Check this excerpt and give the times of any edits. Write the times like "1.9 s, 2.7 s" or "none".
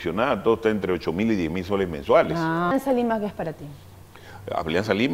2.7 s